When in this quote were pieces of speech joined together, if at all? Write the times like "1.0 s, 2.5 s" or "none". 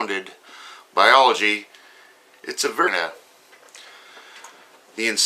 none